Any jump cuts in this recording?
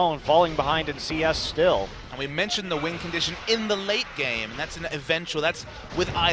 no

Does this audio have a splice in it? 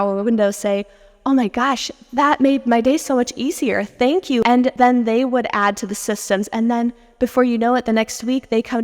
yes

